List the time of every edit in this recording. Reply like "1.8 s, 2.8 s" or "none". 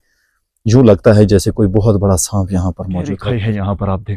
3.2 s

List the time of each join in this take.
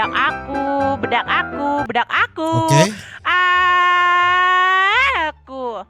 none

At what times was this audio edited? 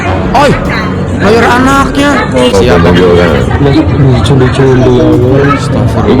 2.5 s

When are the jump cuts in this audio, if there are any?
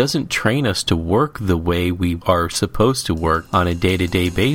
2.2 s, 3.4 s

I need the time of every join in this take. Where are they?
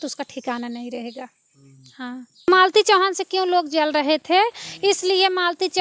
2.5 s

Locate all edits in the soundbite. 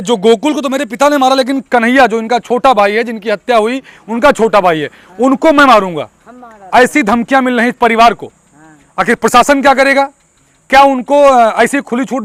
none

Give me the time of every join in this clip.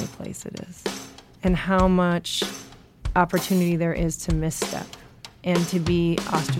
1.1 s

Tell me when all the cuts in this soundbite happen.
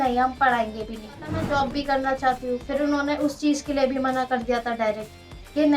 1.3 s

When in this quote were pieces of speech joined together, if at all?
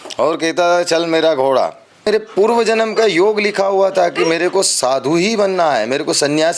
2.1 s

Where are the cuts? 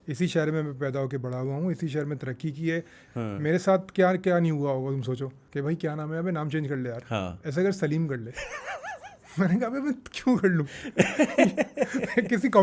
3.0 s, 5.4 s

